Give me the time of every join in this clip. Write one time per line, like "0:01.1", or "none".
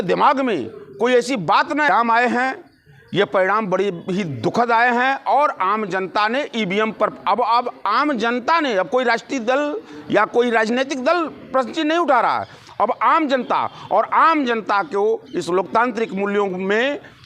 0:01.9